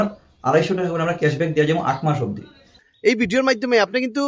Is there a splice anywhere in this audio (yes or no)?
yes